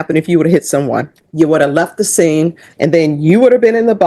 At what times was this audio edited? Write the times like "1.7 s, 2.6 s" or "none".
1.2 s, 2.7 s